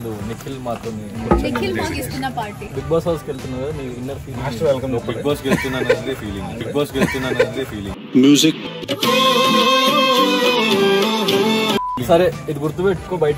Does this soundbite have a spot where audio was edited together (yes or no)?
yes